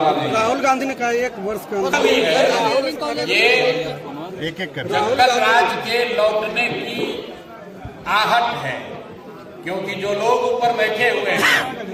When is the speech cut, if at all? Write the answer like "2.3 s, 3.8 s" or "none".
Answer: none